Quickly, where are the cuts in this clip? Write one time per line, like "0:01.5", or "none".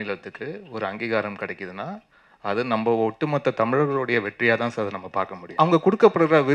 0:05.5